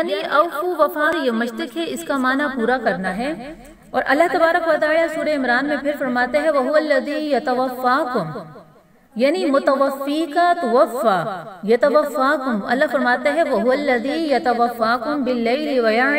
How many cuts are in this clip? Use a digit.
1